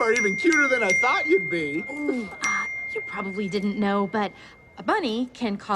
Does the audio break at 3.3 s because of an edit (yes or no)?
no